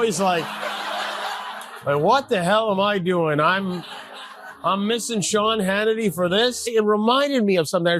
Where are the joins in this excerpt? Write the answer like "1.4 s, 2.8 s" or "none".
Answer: 6.6 s